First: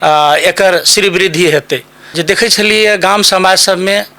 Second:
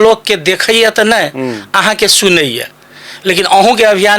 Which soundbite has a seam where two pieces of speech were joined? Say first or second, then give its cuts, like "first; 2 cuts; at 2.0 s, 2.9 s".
first; 1 cut; at 2.1 s